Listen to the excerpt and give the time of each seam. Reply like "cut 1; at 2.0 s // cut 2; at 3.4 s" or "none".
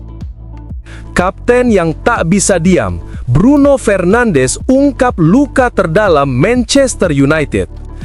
cut 1; at 1.1 s